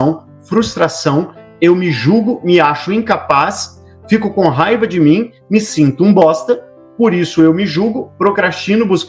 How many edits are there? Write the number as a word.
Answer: zero